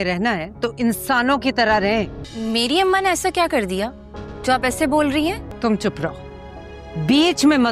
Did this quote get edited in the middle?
yes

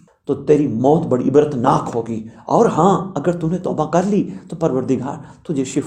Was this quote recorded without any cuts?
yes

